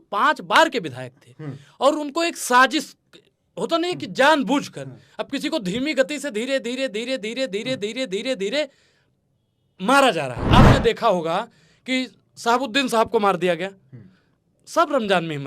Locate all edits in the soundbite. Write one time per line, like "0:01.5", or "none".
0:10.4